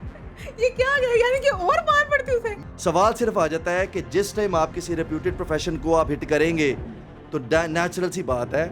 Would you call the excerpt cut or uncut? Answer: cut